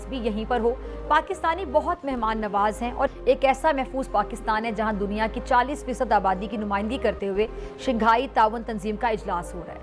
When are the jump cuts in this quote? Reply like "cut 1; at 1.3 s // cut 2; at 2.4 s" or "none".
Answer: cut 1; at 3.2 s